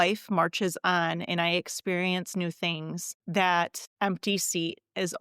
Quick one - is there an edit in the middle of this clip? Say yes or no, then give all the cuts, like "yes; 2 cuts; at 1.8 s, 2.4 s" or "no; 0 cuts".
yes; 2 cuts; at 3.1 s, 3.8 s